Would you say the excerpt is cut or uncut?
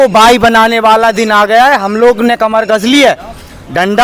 uncut